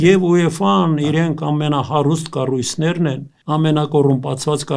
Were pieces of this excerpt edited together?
yes; 1 cut; at 3.3 s

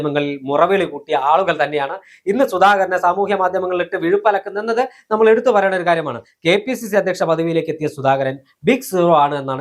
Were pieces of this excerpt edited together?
no; 0 cuts

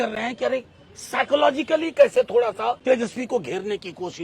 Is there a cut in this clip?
yes; 1 cut; at 2.8 s

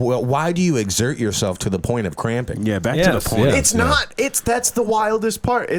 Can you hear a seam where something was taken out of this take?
no; 0 cuts

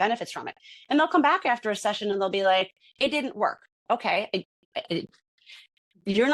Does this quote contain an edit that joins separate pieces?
yes; 1 cut; at 3.7 s

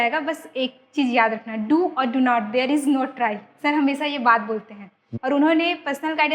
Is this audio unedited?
no; 1 cut; at 5.0 s

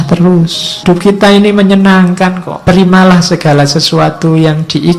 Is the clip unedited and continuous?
no; 2 cuts; at 0.8 s, 2.5 s

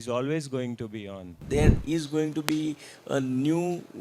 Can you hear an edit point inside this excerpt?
yes; 1 cut; at 1.4 s

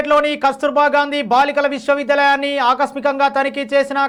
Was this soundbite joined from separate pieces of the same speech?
no; 0 cuts

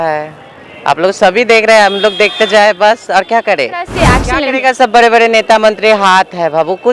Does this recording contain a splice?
yes; 1 cut; at 4.0 s

